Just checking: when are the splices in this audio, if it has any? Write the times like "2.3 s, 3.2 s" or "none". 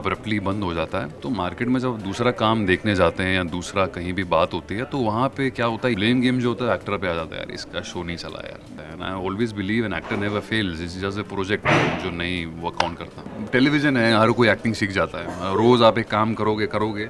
1.1 s, 6.0 s, 8.7 s, 13.3 s

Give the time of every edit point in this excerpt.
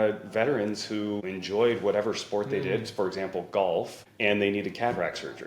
1.3 s, 4.0 s

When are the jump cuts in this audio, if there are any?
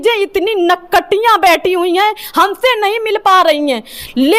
none

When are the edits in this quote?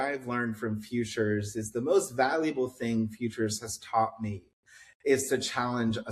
none

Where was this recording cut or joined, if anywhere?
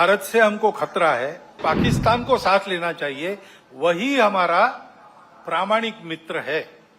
1.6 s

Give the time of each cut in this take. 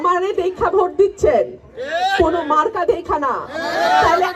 none

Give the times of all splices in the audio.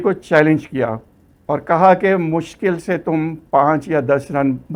none

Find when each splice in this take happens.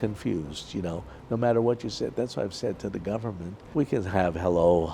3.5 s

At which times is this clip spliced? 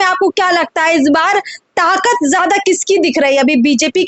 none

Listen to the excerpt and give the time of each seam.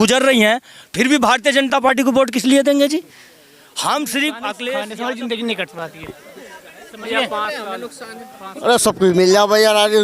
4.9 s

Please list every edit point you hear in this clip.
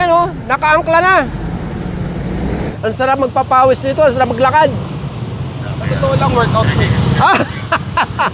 2.7 s

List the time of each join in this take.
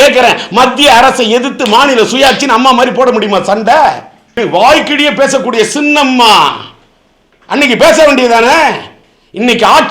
4.2 s

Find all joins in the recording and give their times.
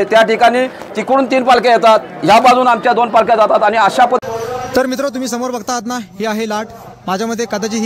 4.2 s

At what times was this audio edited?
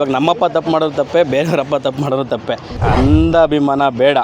2.8 s

